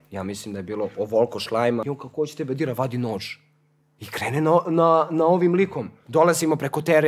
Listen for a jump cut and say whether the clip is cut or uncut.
cut